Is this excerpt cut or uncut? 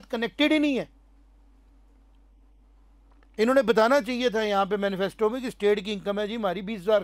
uncut